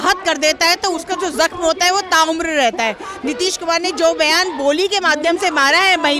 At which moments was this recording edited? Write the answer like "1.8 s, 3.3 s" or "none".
none

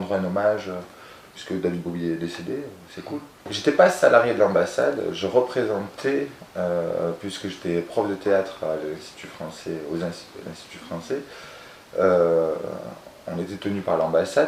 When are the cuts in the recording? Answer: none

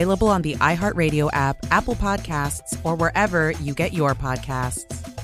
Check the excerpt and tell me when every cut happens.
none

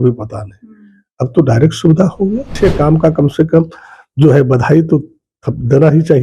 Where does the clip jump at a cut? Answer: 2.5 s

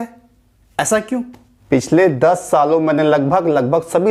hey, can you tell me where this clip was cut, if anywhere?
1.5 s

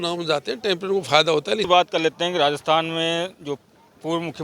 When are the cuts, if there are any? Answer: 1.7 s

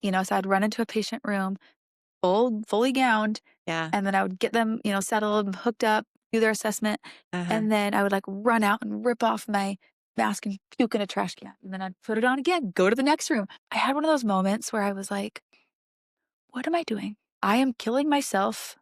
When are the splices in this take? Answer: 13.6 s, 17.2 s

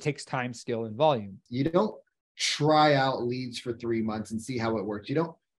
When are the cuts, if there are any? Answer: 1.4 s

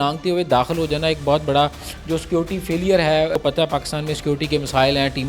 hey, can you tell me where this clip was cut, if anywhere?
3.4 s

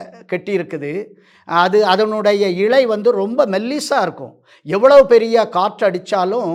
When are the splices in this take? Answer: none

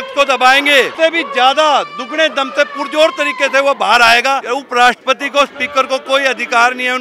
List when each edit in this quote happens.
0.9 s, 4.4 s

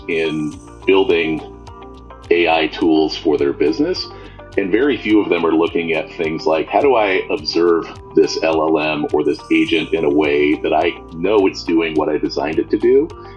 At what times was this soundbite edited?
none

